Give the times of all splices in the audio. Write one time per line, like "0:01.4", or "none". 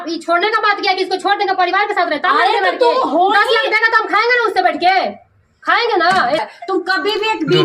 0:06.4